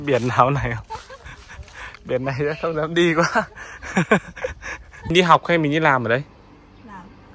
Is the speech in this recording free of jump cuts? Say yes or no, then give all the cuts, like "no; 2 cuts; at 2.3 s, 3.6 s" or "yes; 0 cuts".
no; 1 cut; at 5.1 s